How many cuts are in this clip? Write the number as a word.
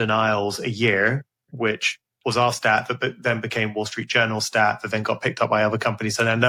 zero